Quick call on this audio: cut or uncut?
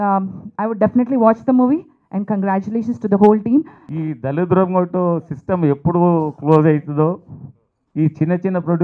cut